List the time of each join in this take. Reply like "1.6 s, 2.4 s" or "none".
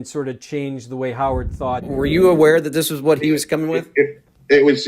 1.9 s